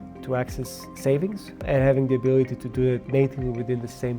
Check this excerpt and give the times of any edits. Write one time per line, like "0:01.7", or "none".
0:01.6
0:03.0